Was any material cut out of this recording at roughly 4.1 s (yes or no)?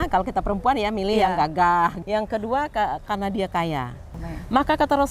yes